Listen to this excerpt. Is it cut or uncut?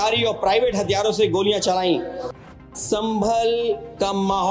cut